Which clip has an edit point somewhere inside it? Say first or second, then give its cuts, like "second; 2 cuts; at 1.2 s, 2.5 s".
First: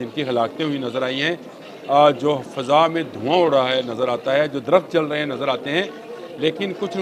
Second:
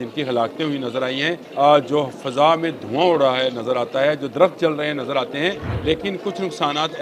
second; 2 cuts; at 1.4 s, 5.7 s